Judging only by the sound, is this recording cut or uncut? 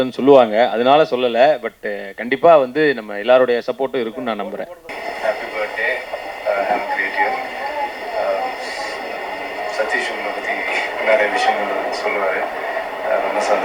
cut